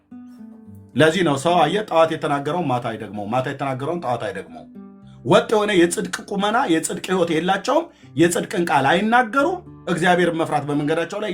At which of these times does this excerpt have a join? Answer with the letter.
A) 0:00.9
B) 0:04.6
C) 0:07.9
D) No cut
A